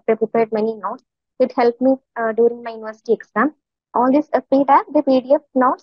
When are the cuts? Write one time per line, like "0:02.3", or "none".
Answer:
0:03.7